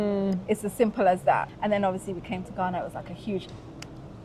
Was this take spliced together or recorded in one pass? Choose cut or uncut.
cut